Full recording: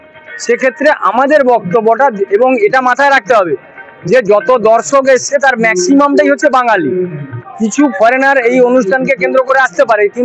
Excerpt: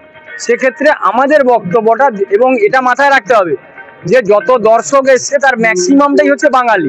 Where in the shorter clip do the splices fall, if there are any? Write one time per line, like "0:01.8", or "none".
none